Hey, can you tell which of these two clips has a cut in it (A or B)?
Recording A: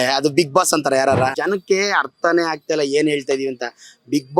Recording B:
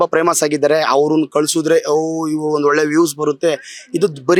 A